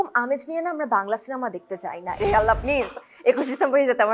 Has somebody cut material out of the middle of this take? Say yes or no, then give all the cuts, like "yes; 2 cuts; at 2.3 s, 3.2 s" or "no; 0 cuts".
yes; 1 cut; at 2.2 s